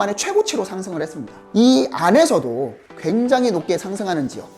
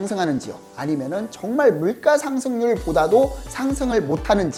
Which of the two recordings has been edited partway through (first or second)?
first